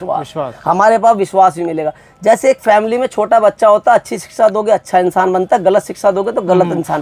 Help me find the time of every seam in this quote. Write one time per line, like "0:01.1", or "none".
none